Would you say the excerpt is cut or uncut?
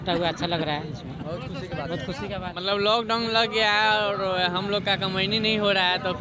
cut